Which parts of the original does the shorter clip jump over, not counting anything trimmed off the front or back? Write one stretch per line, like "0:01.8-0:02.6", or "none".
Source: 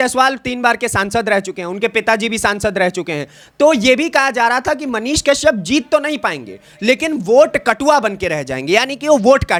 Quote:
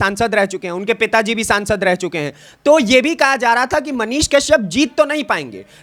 none

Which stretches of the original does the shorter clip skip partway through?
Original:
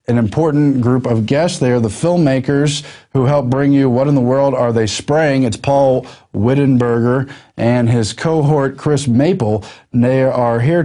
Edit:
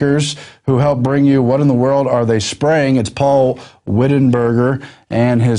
none

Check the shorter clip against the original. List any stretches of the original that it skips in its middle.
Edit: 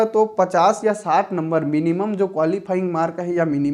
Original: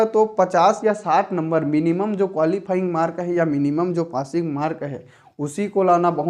none

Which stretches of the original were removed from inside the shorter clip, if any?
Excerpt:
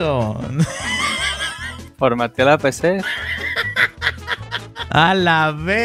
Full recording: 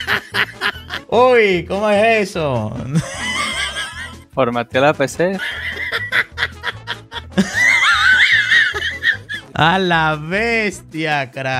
0:07.2-0:09.5

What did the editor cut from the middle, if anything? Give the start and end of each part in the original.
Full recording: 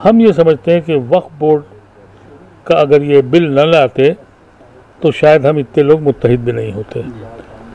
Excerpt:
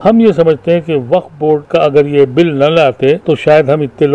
0:01.6-0:02.6
0:04.2-0:05.0

